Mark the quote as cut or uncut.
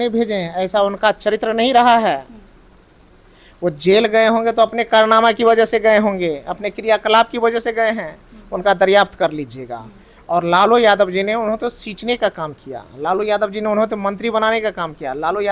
uncut